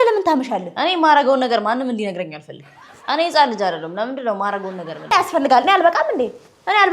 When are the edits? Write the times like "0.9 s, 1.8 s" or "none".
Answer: 5.1 s